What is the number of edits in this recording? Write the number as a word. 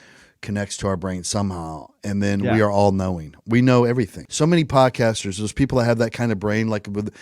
one